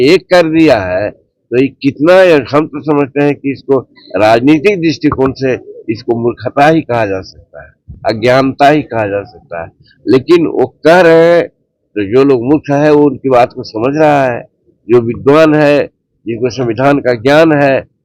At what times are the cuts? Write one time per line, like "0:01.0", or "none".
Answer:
none